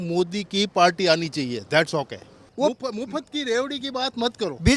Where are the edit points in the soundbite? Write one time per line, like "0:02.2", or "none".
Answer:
0:02.5

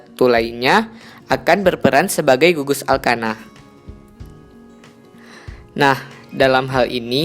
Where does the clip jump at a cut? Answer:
0:03.5
0:05.7

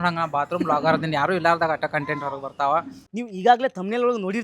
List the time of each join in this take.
0:03.0

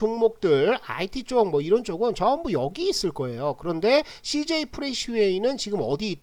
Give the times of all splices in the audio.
none

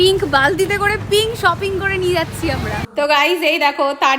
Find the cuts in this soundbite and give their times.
0:02.8

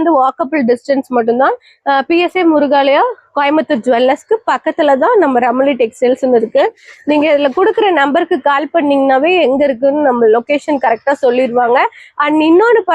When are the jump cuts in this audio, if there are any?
none

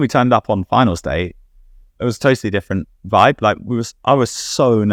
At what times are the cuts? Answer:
none

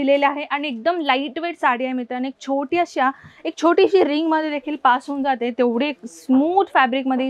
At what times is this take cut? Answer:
none

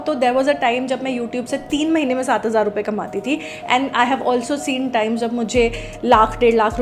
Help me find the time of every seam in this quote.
none

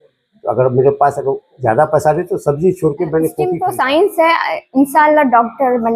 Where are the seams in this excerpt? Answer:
0:03.6

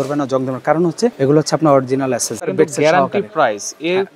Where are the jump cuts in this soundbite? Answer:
0:01.1
0:02.4

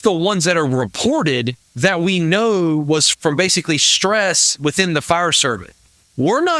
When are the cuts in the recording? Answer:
0:01.6
0:03.1

